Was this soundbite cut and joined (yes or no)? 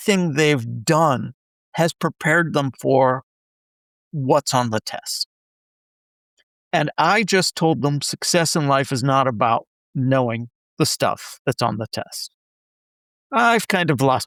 no